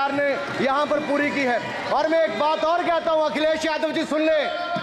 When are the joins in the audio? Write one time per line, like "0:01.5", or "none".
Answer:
none